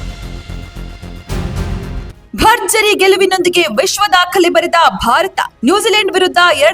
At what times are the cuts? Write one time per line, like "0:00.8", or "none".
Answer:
0:01.8